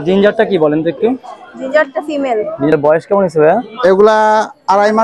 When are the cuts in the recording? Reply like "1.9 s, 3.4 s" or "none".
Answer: 2.7 s